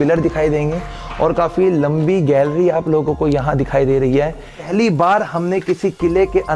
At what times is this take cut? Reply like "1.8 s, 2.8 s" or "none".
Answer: 4.6 s